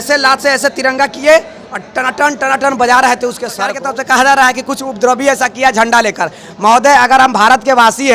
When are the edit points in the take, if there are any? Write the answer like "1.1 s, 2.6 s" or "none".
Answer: 3.8 s